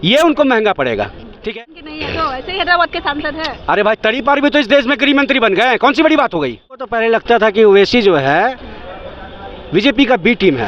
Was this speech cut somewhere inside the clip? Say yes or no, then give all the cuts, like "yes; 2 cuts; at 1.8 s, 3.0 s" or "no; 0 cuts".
yes; 2 cuts; at 1.3 s, 6.9 s